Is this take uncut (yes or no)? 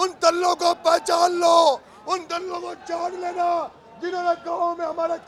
yes